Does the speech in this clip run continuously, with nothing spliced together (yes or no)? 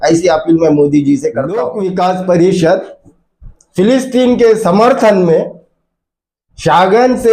no